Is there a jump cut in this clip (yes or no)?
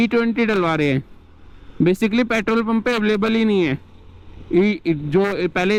no